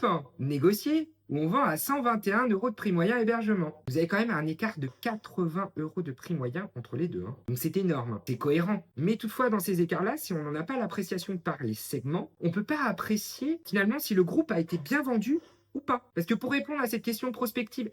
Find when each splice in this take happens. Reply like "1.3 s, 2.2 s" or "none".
3.8 s, 7.4 s, 8.2 s